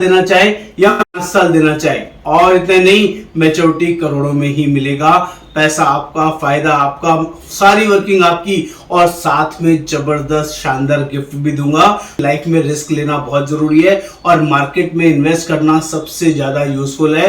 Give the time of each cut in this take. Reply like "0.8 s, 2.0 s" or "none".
12.2 s

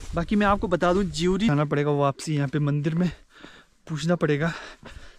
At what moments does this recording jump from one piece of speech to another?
1.5 s

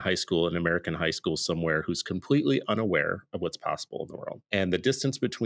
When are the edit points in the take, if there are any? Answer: 4.4 s

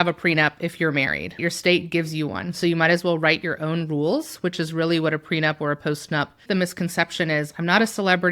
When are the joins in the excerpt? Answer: 1.4 s, 6.5 s

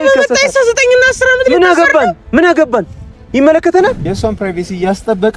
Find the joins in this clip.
4.1 s

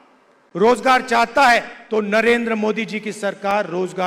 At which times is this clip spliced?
1.8 s

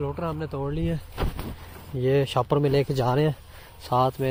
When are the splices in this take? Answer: none

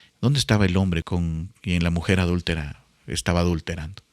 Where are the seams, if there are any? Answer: 1.0 s

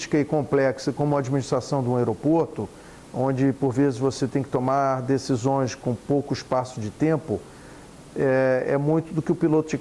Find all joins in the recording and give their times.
none

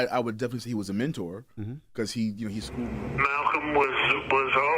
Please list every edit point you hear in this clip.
2.9 s

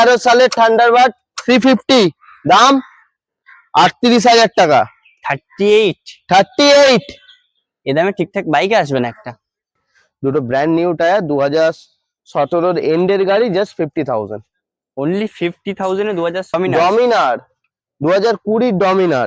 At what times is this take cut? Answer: 9.9 s, 16.5 s

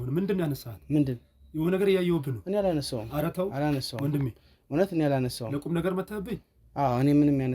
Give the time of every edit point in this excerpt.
none

